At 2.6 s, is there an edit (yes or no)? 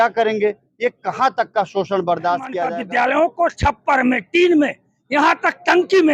yes